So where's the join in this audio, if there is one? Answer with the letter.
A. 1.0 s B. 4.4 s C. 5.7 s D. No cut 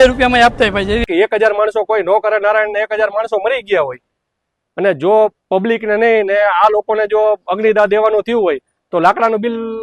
A